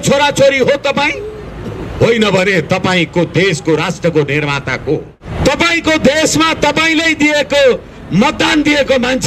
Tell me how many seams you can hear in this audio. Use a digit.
1